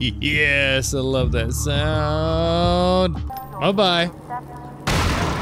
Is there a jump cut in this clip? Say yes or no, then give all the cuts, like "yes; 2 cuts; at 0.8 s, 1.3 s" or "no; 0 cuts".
yes; 1 cut; at 3.4 s